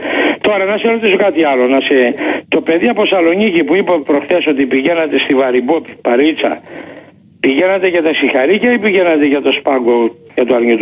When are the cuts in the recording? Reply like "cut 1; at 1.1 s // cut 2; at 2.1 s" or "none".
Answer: cut 1; at 8.0 s